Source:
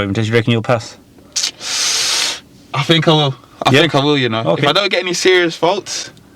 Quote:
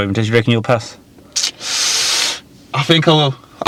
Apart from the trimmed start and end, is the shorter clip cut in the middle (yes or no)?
no